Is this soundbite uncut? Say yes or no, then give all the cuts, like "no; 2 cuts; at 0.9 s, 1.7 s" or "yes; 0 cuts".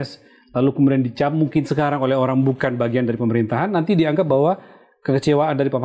yes; 0 cuts